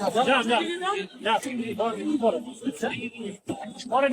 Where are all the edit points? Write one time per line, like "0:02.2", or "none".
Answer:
0:02.5

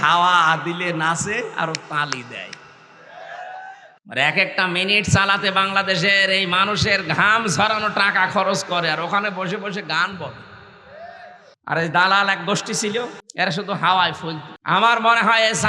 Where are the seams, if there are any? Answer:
0:03.9
0:11.5
0:13.2
0:14.5

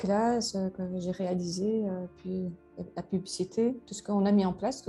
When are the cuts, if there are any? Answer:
none

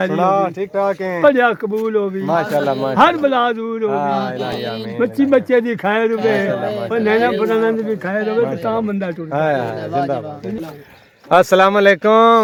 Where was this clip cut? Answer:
none

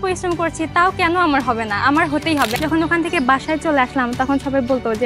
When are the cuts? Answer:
0:02.5

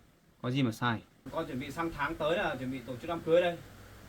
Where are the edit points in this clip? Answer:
0:01.2

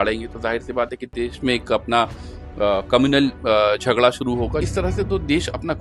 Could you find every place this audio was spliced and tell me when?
0:04.7

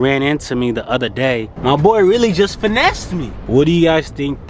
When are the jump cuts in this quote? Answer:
0:01.5
0:03.3

